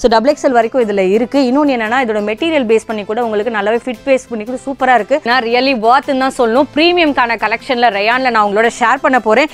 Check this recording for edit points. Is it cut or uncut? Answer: cut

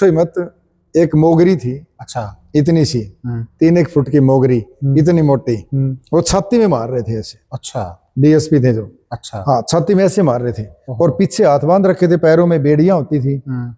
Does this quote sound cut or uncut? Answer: uncut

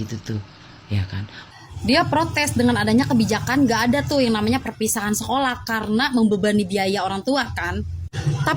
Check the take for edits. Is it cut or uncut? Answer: cut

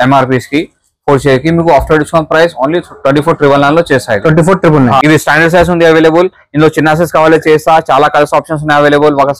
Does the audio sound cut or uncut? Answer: cut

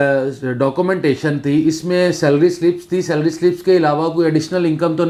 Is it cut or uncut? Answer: uncut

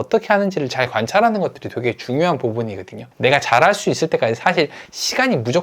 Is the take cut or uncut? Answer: uncut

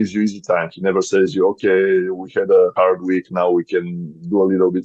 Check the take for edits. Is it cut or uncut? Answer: uncut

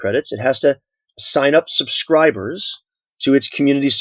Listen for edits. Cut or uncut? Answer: cut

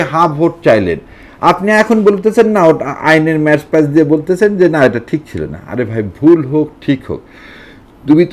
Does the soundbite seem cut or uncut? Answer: uncut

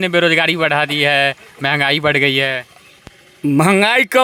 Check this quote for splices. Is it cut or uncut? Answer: uncut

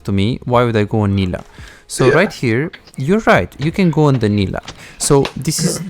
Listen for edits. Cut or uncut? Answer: cut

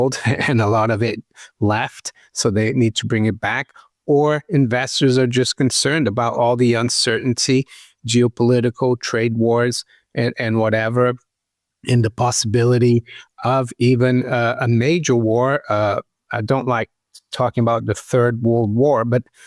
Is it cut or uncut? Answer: uncut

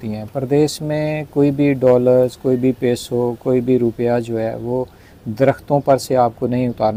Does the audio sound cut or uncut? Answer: uncut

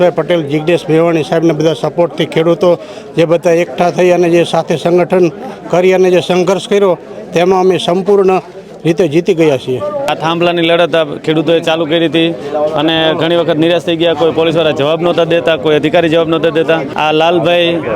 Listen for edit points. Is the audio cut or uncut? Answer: cut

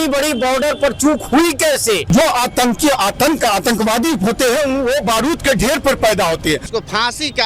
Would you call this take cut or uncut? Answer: cut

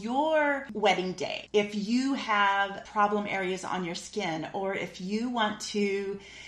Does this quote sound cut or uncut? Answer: cut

